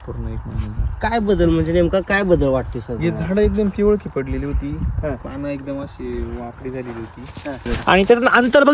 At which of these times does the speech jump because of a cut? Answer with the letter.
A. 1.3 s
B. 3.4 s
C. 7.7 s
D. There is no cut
C